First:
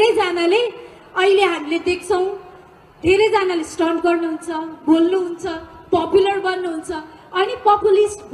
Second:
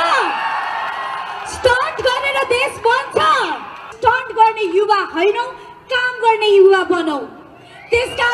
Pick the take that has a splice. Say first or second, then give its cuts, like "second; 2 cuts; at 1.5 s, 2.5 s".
second; 1 cut; at 3.9 s